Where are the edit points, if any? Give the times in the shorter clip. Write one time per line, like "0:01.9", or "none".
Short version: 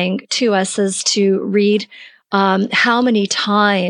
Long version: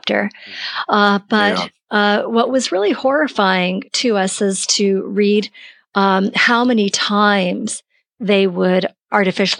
none